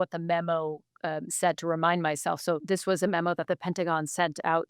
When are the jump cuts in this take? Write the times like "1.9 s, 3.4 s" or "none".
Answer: 2.6 s